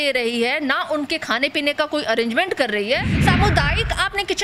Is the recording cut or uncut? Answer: cut